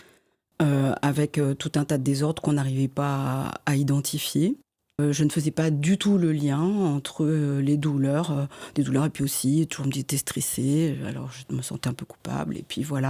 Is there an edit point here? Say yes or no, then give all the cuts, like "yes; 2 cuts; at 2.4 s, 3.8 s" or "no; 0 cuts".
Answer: yes; 1 cut; at 5.0 s